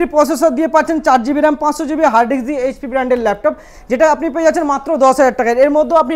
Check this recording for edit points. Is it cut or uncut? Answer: uncut